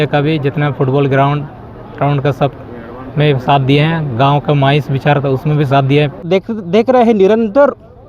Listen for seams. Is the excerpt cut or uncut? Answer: cut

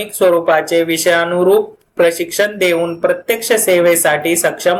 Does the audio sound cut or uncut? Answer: uncut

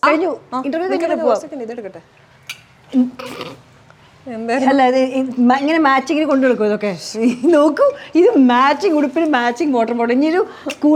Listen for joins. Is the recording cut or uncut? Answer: uncut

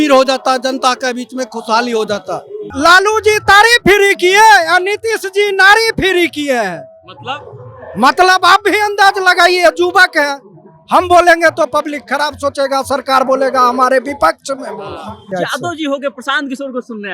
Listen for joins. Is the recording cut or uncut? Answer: cut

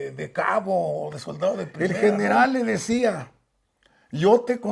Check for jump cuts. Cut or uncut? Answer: cut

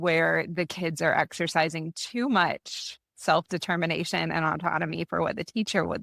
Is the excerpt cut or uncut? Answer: uncut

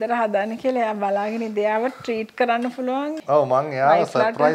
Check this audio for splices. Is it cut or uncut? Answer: cut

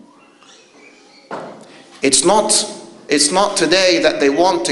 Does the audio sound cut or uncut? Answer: uncut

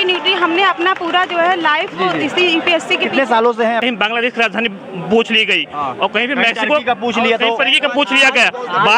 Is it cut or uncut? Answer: cut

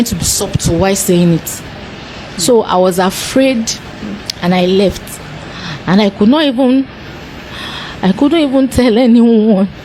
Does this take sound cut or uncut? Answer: uncut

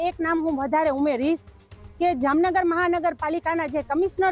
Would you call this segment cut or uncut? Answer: uncut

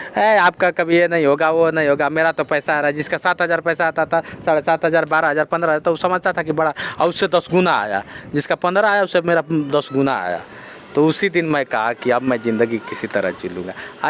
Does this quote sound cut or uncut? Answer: uncut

